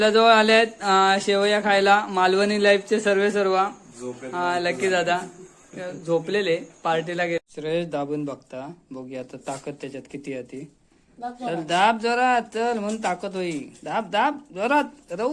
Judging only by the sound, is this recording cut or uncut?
cut